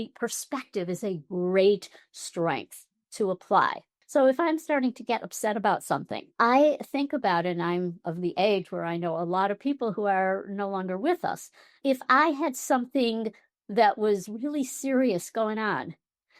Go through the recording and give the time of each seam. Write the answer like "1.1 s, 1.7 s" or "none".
3.9 s, 11.8 s